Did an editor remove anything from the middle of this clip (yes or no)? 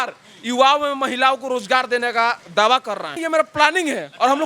yes